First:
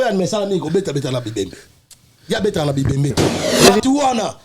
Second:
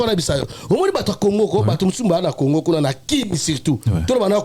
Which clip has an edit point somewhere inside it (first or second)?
first